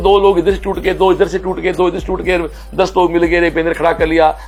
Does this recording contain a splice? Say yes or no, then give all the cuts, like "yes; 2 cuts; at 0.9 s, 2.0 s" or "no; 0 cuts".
no; 0 cuts